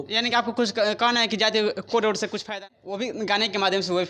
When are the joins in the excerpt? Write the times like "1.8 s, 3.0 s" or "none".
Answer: 2.6 s